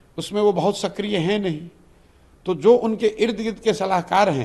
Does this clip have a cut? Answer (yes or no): no